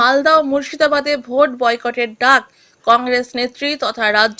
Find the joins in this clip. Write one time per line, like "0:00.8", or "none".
none